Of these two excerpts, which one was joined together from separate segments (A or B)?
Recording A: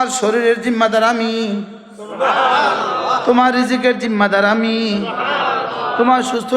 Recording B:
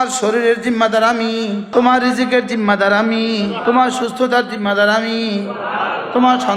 B